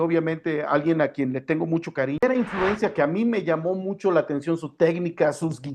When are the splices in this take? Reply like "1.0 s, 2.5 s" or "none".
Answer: 2.2 s